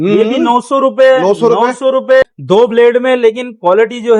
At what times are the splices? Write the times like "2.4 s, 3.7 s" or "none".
2.2 s